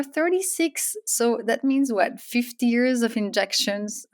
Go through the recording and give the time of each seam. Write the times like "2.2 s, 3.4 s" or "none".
none